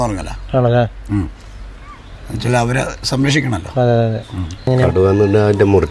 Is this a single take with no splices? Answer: no; 1 cut; at 4.7 s

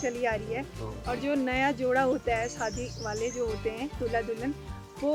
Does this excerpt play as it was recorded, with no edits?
yes; 0 cuts

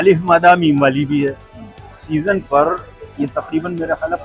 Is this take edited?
no; 0 cuts

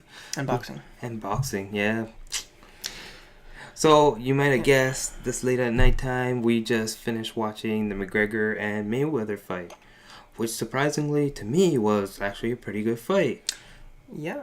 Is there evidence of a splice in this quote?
yes; 1 cut; at 11.3 s

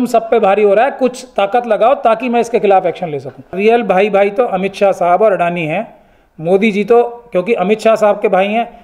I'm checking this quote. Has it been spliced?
yes; 1 cut; at 3.6 s

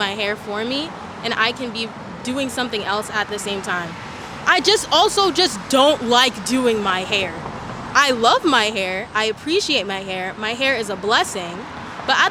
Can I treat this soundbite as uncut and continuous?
yes; 0 cuts

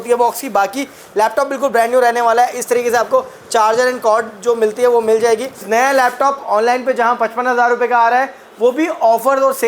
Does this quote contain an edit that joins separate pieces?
yes; 1 cut; at 5.6 s

